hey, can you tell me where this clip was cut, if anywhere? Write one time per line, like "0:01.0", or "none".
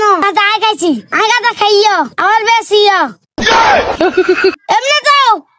0:04.6